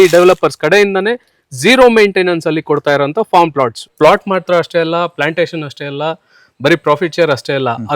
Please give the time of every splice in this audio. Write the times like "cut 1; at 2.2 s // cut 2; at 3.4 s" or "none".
cut 1; at 3.9 s